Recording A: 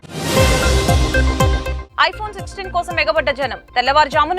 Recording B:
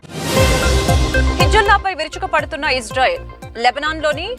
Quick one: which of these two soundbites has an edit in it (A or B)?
A